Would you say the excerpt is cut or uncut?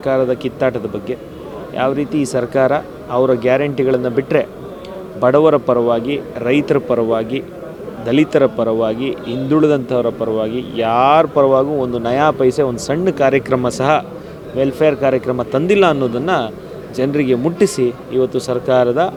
uncut